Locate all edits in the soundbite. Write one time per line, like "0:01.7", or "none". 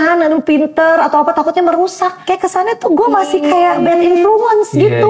0:02.2
0:03.8